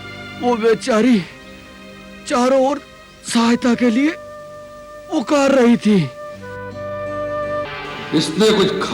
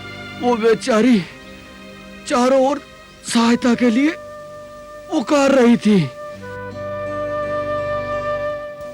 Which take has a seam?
first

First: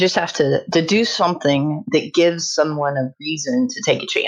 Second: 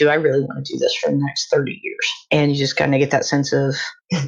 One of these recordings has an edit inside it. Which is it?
second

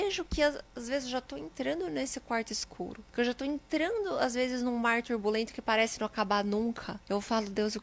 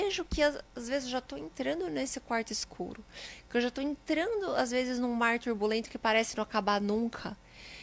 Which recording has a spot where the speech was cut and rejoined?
first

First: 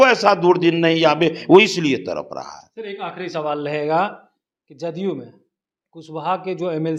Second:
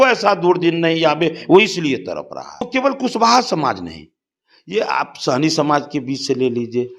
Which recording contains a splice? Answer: second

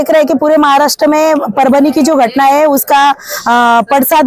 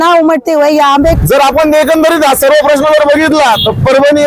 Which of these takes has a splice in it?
second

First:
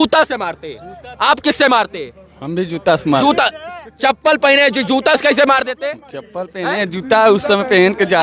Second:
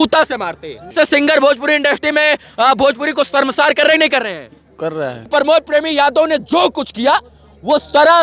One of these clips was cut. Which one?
second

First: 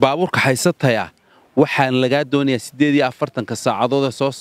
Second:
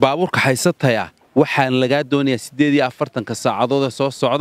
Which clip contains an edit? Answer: second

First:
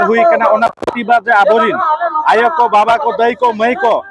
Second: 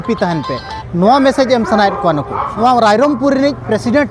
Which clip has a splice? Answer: second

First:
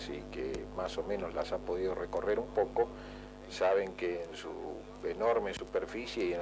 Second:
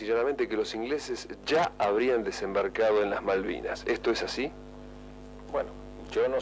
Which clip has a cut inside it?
second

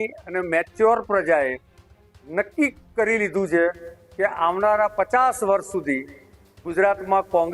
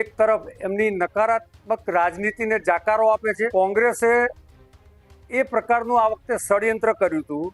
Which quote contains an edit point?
second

